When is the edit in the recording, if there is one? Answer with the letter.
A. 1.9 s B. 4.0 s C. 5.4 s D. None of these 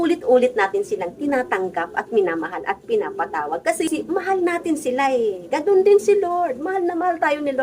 B